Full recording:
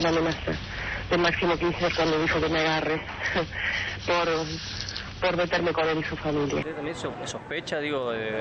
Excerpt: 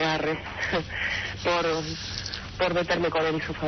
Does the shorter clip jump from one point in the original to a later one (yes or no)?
no